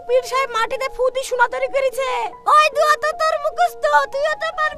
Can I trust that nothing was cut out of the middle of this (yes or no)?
yes